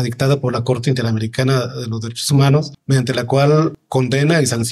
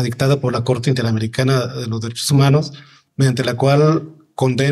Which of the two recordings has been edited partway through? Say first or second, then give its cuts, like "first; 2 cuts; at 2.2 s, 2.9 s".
first; 2 cuts; at 2.8 s, 3.8 s